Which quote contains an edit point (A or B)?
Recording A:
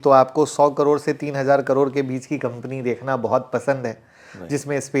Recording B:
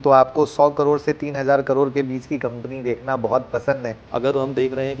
B